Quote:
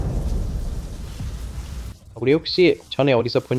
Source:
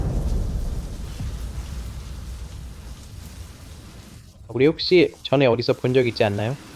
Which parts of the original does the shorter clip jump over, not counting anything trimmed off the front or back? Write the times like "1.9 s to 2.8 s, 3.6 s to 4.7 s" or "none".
1.9 s to 4.3 s